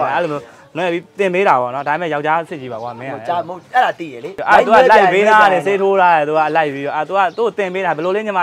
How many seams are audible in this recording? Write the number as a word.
one